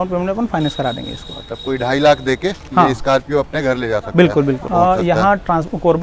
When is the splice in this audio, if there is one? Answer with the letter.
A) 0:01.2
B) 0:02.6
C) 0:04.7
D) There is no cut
C